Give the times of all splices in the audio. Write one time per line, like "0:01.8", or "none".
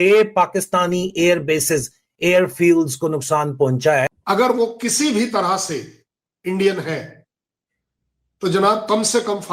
0:04.1